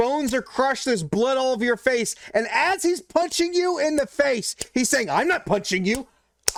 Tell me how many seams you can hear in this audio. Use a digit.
0